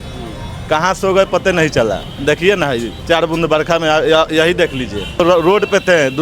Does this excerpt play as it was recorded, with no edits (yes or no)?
no